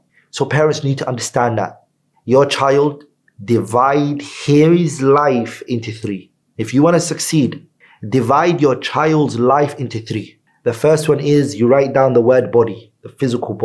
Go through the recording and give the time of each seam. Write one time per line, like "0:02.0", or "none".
0:02.0